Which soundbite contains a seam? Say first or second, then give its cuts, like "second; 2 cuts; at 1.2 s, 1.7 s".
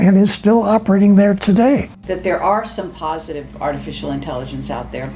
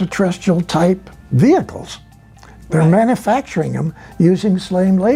first; 1 cut; at 1.9 s